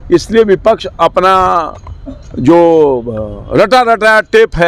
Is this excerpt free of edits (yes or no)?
yes